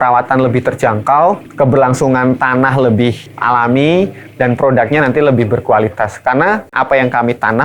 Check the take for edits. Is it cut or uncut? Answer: cut